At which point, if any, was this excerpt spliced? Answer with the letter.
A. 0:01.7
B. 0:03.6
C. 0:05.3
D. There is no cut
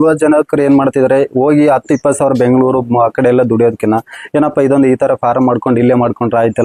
D